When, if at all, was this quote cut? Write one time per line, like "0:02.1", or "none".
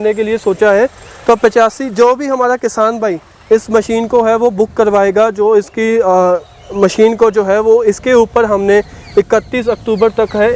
none